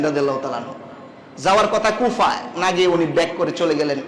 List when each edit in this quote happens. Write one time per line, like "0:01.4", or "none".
none